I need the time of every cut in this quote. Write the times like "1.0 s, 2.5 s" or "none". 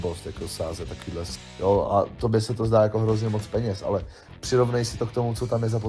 1.4 s